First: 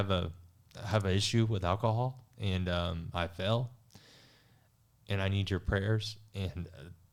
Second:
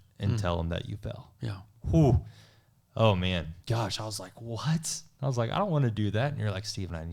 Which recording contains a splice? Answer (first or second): second